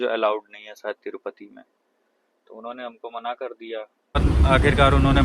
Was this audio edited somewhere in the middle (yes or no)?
yes